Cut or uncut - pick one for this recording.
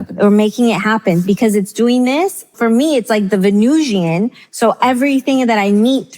cut